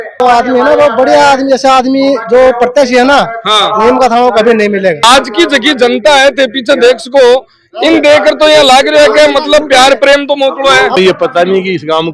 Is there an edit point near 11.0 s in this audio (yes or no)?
yes